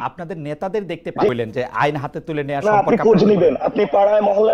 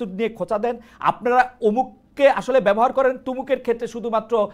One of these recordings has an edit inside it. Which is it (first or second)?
first